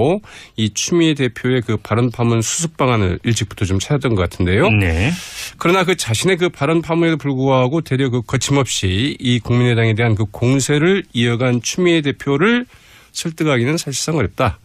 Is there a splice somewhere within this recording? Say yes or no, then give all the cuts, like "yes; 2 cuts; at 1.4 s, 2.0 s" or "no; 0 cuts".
no; 0 cuts